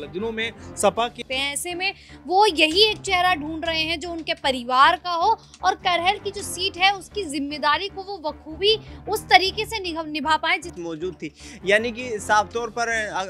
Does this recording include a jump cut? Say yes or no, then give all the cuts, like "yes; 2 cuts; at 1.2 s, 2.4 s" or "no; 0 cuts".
yes; 2 cuts; at 1.2 s, 10.8 s